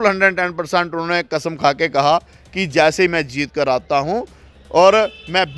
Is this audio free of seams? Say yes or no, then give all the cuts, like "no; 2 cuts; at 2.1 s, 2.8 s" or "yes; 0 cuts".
yes; 0 cuts